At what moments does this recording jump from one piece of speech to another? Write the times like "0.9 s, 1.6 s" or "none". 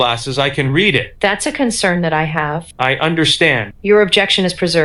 none